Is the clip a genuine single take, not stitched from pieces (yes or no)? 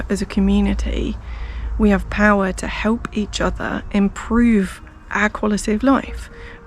yes